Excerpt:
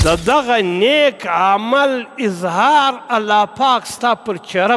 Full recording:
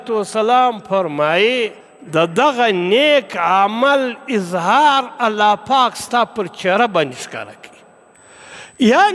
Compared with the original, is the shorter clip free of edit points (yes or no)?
yes